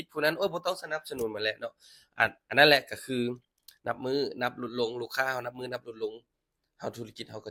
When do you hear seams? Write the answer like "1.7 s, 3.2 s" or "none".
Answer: none